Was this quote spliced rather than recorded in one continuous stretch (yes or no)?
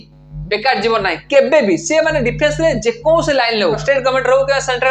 yes